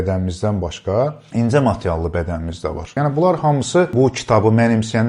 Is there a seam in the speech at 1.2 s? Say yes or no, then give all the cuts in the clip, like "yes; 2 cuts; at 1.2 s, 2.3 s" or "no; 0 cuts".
yes; 3 cuts; at 1.2 s, 3.0 s, 3.9 s